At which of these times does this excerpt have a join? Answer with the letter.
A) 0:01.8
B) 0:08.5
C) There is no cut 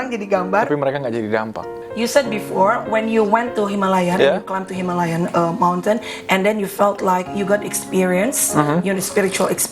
A